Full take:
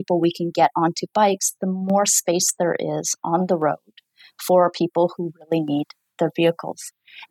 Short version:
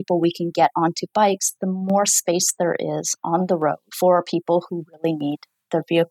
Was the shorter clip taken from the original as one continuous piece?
no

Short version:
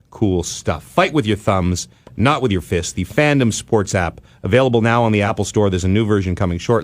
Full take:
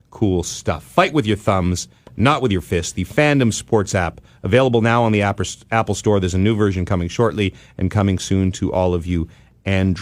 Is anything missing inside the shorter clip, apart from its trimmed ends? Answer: yes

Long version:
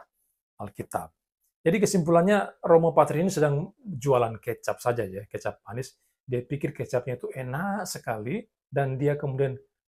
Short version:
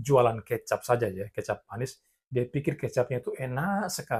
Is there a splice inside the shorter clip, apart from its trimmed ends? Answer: no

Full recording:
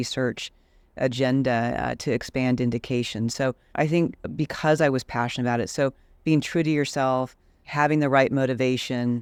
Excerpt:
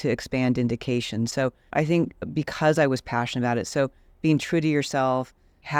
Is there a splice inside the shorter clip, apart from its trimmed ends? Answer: no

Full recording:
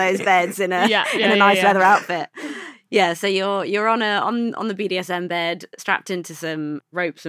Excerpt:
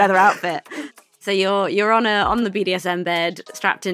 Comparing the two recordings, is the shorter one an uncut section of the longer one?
no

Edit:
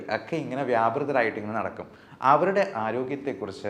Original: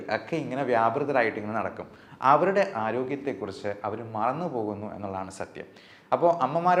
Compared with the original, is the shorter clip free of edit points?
yes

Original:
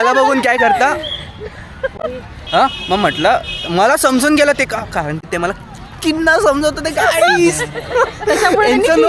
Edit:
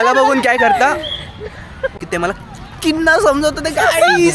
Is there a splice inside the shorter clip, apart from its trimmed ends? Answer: yes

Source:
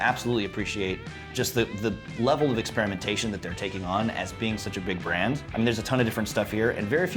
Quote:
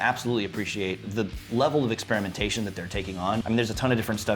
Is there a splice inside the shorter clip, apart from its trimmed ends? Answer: yes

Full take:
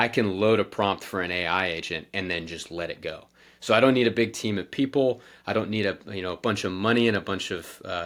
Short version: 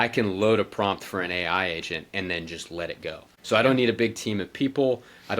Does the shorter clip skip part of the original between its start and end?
yes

